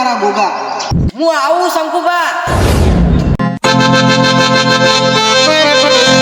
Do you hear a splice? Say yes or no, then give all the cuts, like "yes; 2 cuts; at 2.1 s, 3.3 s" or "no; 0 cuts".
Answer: yes; 1 cut; at 0.9 s